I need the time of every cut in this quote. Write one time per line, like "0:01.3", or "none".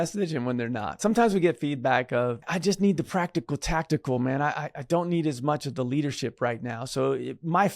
0:01.0
0:02.4